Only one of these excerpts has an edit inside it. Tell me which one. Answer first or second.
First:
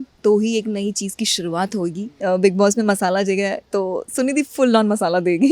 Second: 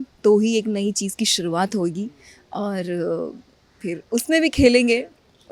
first